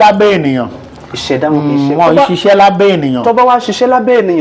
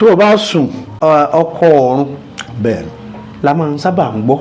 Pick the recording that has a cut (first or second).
second